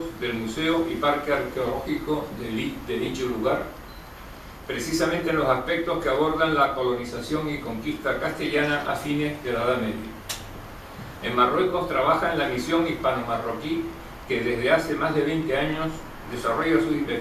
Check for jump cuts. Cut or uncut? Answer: cut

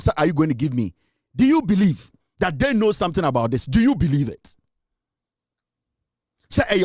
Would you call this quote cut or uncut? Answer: uncut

